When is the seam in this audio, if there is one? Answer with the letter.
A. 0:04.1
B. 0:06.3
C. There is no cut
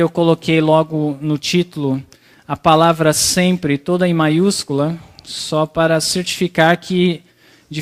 A